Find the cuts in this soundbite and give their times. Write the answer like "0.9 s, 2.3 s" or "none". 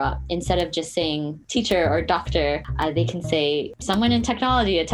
1.4 s, 2.7 s, 3.7 s